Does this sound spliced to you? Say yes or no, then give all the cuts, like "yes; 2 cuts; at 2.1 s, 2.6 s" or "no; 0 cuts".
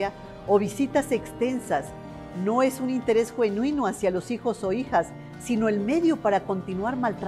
yes; 1 cut; at 4.8 s